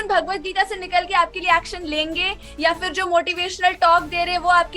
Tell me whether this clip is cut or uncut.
uncut